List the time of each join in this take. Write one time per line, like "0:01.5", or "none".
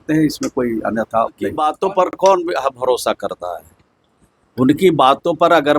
0:01.6